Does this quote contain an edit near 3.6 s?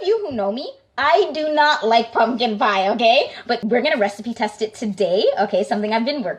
yes; 1 cut; at 3.6 s

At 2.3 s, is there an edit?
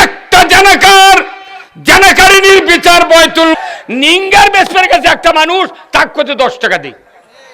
no; 1 cut; at 3.6 s

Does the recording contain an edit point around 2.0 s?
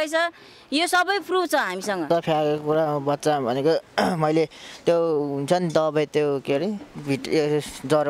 yes; 1 cut; at 2.0 s

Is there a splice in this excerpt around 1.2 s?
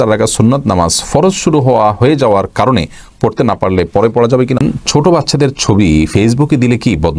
no; 1 cut; at 4.6 s

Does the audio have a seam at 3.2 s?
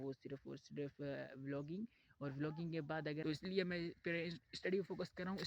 yes; 1 cut; at 3.2 s

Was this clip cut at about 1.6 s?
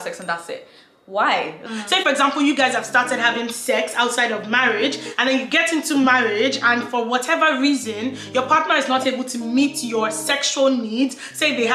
yes; 1 cut; at 1.6 s

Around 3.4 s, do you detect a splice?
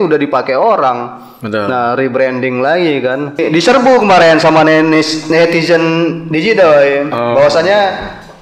yes; 1 cut; at 3.4 s

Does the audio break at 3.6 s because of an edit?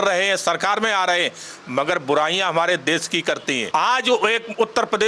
yes; 1 cut; at 3.6 s

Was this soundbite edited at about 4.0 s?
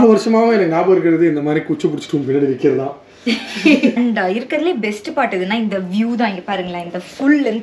yes; 1 cut; at 4.0 s

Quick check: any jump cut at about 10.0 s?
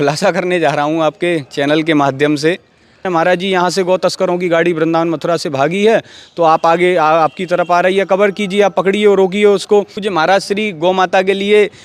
yes; 2 cuts; at 3.0 s, 10.0 s

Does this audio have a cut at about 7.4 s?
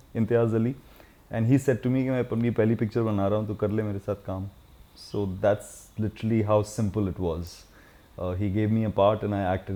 no; 0 cuts

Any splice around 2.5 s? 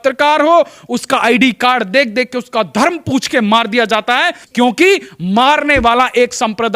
no; 1 cut; at 4.4 s

